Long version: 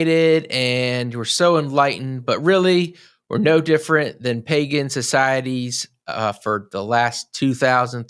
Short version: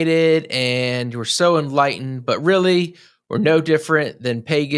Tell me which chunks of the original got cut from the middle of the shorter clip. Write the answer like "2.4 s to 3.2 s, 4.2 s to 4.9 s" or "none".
none